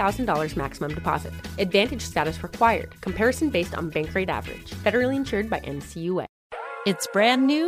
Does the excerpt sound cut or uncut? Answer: cut